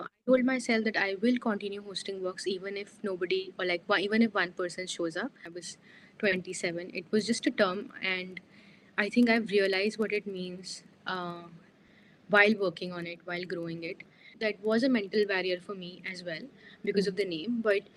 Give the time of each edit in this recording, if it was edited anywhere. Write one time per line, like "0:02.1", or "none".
0:05.5
0:14.3